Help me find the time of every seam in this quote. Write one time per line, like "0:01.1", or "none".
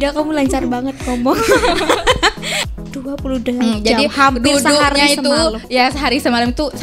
0:02.6